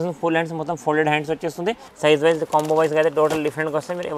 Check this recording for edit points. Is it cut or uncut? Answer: cut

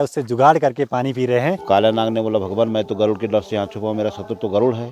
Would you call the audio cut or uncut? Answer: cut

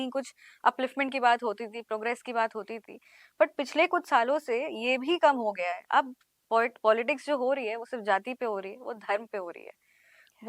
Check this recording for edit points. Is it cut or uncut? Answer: uncut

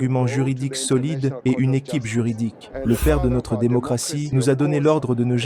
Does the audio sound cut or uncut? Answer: cut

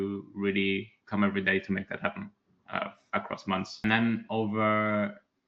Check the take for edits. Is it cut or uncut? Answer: cut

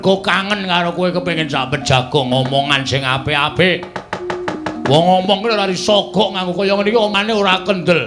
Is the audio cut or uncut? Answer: cut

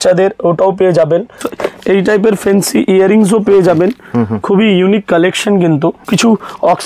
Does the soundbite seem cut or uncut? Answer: cut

